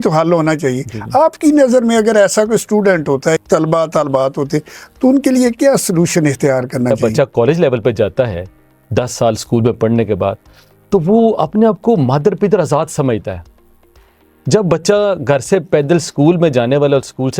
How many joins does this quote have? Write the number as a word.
two